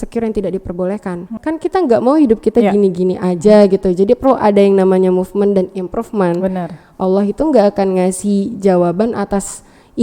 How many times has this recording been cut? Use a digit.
1